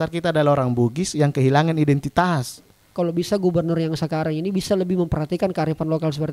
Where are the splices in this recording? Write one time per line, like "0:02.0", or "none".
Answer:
0:02.8